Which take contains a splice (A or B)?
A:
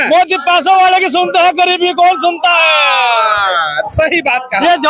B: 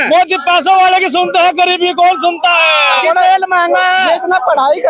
B